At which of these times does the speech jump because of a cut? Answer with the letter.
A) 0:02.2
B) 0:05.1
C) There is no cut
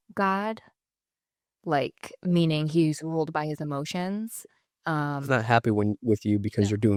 C